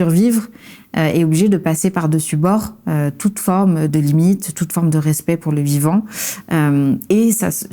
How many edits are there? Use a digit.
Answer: 1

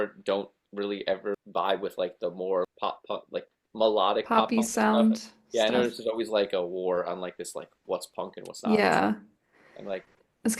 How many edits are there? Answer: 2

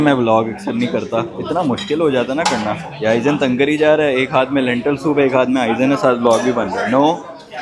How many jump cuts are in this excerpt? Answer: 0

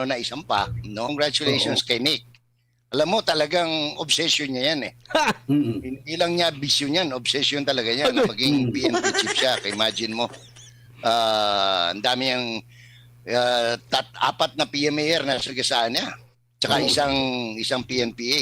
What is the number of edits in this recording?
1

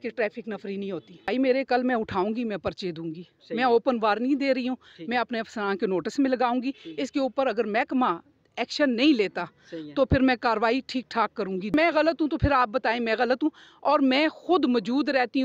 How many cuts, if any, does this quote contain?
2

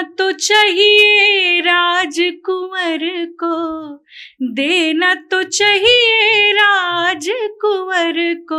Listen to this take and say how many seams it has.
0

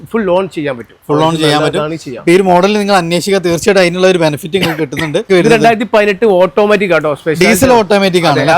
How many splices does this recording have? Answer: 1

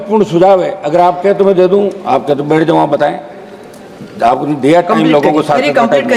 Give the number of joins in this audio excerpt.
0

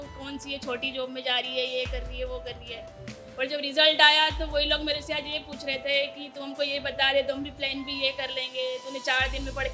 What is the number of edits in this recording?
0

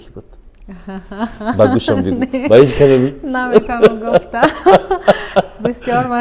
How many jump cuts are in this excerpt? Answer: 0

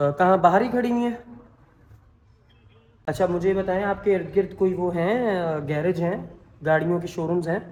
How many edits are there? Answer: 0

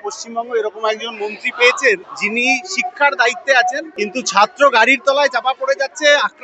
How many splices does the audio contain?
2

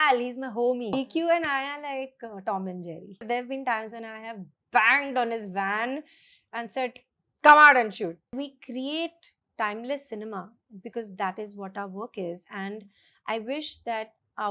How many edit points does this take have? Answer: 3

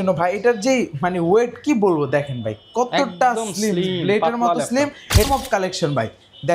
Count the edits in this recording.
1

